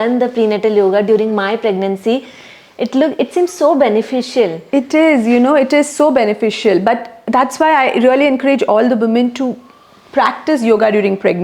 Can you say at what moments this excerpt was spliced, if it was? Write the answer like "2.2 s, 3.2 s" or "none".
none

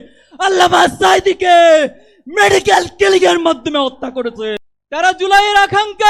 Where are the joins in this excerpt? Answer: 4.7 s

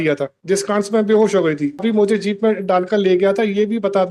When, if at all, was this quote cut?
1.8 s

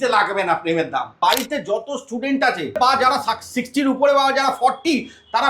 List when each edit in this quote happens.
1.1 s, 2.8 s

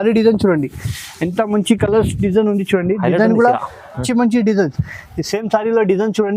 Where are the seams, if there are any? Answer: 4.1 s

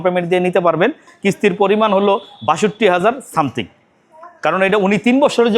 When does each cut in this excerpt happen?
1.1 s

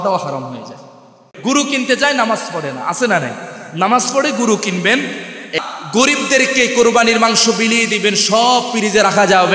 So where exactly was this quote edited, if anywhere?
1.2 s, 5.5 s

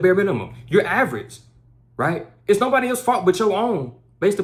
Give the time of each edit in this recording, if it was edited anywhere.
none

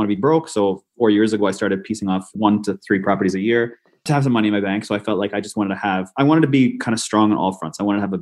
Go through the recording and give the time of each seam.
0.9 s, 2.3 s

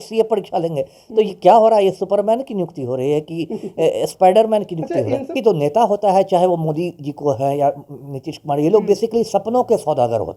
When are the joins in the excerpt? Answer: 5.3 s

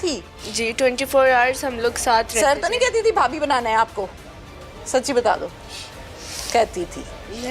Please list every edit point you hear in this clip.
none

